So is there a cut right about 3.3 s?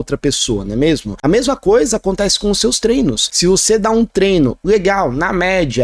yes; 2 cuts; at 1.1 s, 3.3 s

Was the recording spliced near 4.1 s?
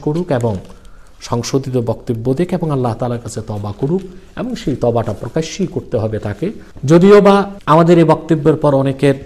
no; 2 cuts; at 6.7 s, 7.5 s

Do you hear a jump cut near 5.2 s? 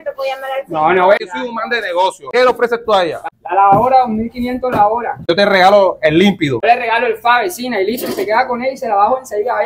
no; 1 cut; at 1.3 s

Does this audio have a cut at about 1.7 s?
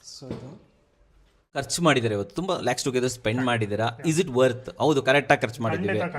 yes; 1 cut; at 1.7 s

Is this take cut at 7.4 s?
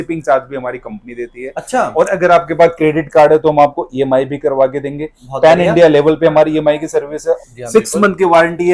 yes; 1 cut; at 7.4 s

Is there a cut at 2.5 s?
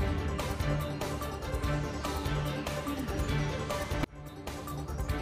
no; 1 cut; at 1.2 s

